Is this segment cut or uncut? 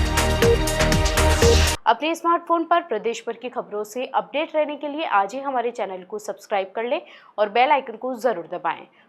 uncut